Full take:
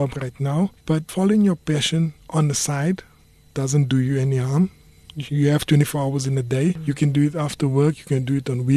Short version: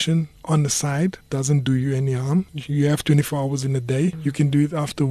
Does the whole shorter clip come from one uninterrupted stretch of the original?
no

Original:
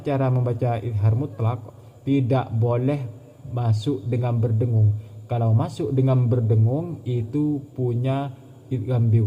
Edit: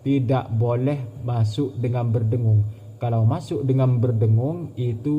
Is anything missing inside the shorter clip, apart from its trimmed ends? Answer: yes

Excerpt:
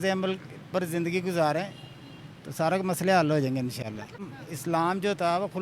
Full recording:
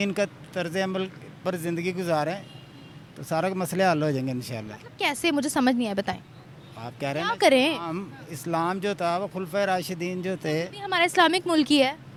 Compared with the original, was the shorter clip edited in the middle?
yes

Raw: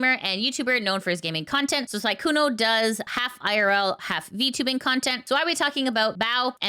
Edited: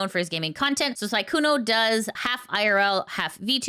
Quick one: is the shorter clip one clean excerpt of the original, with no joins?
yes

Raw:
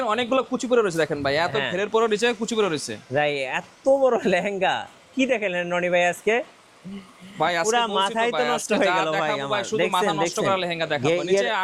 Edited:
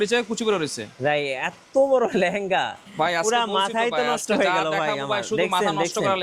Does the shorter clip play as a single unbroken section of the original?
no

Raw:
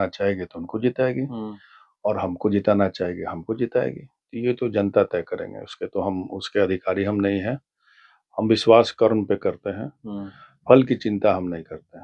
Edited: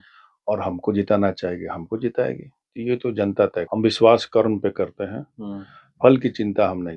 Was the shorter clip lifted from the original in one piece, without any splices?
no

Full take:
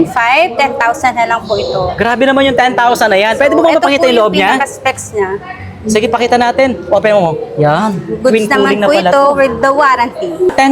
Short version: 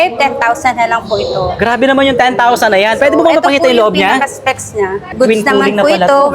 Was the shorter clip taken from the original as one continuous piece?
no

